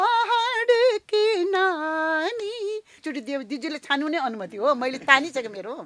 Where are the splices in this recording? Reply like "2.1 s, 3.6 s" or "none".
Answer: 3.0 s